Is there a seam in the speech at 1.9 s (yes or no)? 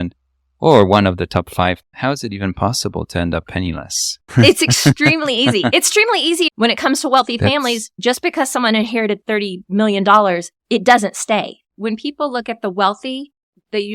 yes